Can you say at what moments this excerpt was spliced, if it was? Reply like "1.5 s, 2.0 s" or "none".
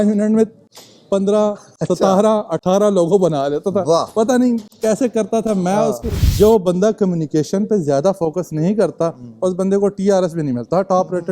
6.2 s